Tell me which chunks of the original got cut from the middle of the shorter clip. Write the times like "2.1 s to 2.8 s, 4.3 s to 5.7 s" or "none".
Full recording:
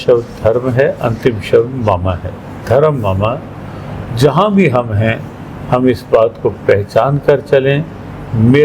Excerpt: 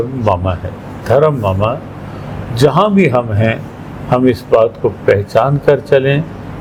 none